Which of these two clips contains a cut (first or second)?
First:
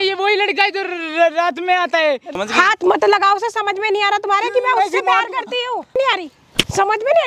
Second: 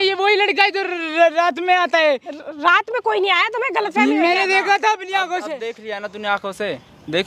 first